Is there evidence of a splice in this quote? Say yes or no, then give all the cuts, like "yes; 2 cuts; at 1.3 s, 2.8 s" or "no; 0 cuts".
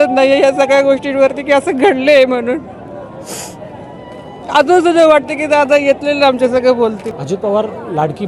yes; 1 cut; at 7.1 s